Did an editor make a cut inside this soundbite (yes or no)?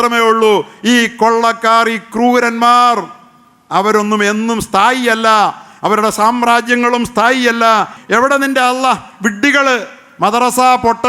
yes